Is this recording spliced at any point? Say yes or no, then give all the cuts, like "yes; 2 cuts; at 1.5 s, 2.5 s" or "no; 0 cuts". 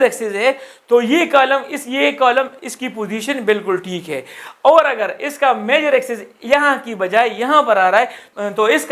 no; 0 cuts